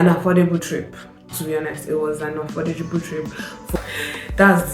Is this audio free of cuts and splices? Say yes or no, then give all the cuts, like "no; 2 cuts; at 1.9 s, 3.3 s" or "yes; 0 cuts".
no; 1 cut; at 3.8 s